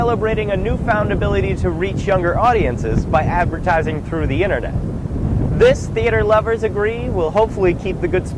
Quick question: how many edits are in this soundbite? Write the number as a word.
zero